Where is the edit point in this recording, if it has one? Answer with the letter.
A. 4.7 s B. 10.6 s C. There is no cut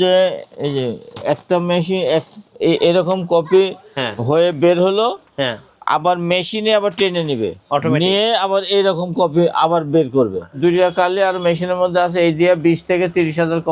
B